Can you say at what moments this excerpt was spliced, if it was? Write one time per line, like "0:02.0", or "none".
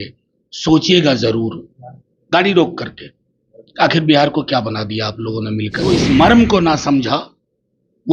0:05.9

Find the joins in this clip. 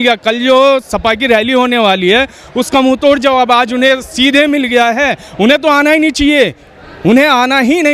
none

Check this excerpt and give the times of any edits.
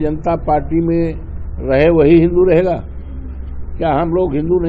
none

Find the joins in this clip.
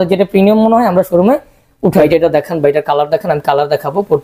0:02.0

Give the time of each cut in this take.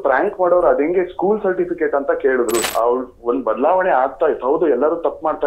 0:02.6

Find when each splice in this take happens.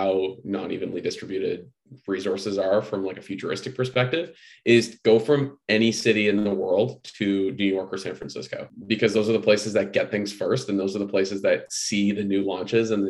0:08.7

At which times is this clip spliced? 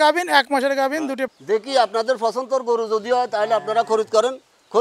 0:01.3

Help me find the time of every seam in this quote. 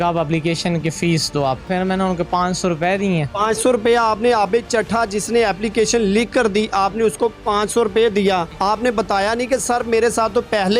0:01.7
0:08.5

